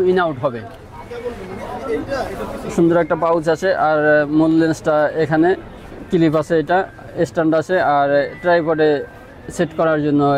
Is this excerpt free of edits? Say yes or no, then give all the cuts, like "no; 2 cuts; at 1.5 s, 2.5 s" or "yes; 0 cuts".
yes; 0 cuts